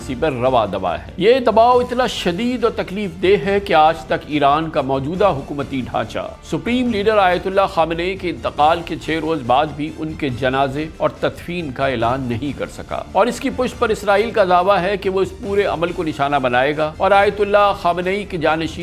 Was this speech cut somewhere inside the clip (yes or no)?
yes